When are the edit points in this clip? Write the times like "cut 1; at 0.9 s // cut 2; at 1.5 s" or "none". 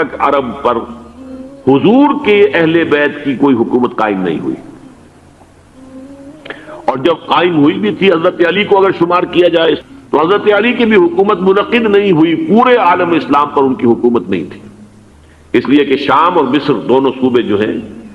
cut 1; at 9.8 s